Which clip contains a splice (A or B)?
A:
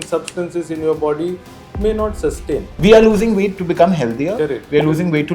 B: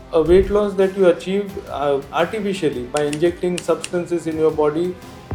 A